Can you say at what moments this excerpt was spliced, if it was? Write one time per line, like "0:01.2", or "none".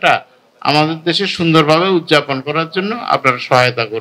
none